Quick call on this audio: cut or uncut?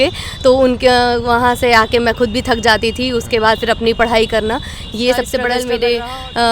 cut